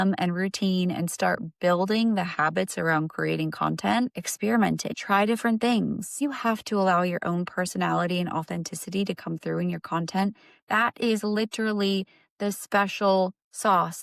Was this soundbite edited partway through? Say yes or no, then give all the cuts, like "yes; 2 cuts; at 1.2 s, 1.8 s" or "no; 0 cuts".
no; 0 cuts